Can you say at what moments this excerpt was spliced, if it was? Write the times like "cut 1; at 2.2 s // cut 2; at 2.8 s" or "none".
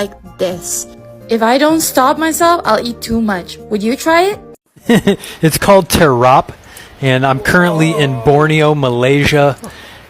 cut 1; at 4.8 s